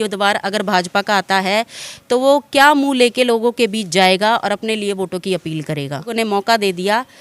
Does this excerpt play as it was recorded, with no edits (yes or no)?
no